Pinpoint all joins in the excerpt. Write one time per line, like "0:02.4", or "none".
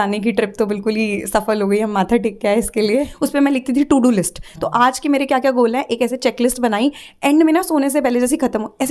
0:03.1